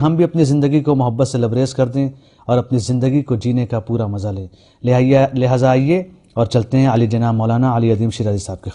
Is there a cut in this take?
yes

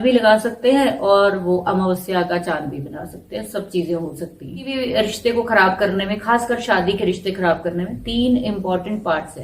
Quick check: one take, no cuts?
no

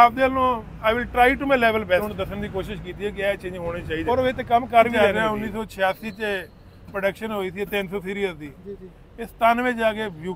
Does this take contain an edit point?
yes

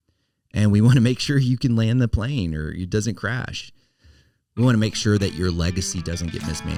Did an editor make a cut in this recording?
no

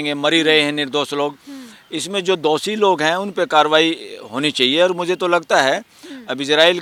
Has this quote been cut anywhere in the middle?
no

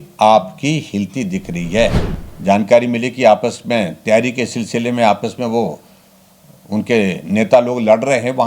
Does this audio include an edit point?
yes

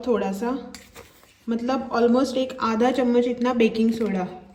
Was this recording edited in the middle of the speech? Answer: no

